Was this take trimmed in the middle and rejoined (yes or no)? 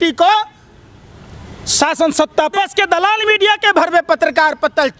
yes